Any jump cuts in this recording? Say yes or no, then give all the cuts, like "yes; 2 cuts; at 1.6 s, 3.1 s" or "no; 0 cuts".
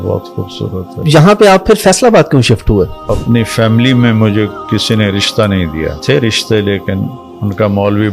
yes; 3 cuts; at 1.0 s, 3.1 s, 6.0 s